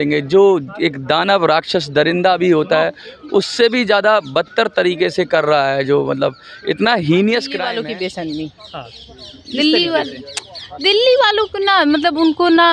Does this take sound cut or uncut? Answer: cut